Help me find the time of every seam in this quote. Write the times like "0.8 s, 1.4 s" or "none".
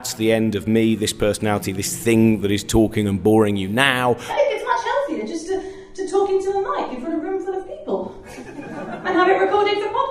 4.3 s

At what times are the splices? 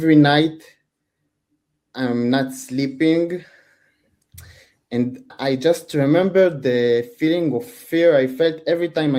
5.3 s

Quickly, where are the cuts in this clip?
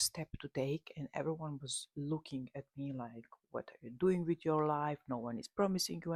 none

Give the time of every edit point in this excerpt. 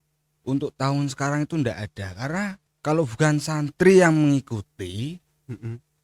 2.7 s

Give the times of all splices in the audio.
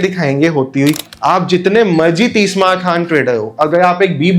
1.0 s

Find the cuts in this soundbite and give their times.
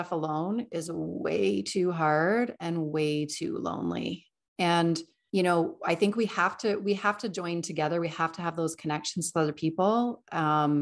none

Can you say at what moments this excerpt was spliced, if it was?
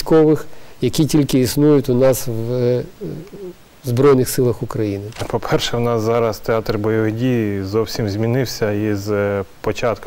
5.1 s

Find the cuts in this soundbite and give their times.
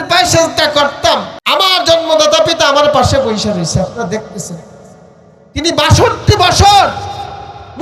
1.3 s

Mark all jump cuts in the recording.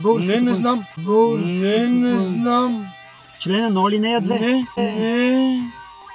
none

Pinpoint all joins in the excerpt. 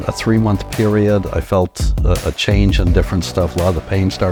none

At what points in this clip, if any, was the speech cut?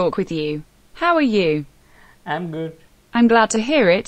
2.9 s

